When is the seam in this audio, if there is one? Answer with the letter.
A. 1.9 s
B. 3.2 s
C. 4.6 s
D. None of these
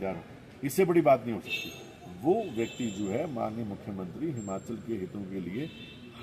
D